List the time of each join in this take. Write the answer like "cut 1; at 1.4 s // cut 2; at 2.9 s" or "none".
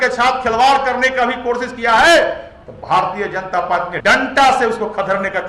cut 1; at 3.9 s